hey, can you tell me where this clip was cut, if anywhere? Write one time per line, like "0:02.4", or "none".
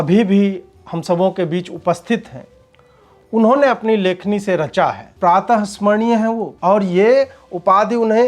0:05.1
0:06.5